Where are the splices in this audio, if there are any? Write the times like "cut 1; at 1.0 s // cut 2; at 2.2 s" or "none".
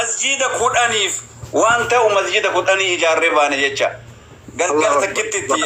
none